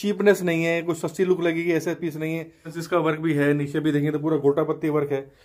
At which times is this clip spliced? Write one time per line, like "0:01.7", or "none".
0:02.8